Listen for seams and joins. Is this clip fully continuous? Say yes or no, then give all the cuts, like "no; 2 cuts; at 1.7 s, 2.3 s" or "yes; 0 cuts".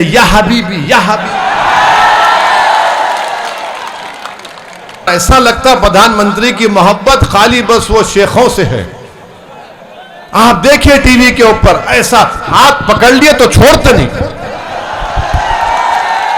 no; 1 cut; at 5.1 s